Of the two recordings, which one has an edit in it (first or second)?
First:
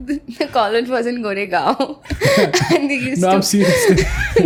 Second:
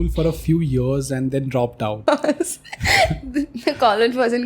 second